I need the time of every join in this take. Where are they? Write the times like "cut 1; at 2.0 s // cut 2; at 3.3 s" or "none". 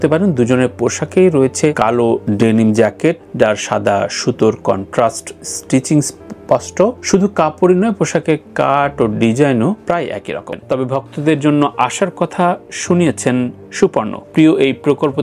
cut 1; at 10.6 s